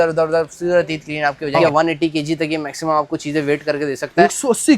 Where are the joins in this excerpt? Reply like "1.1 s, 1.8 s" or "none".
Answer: 1.6 s